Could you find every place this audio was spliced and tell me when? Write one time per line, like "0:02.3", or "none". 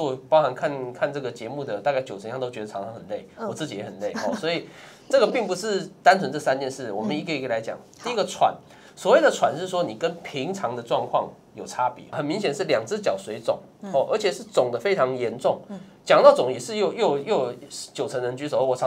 0:12.2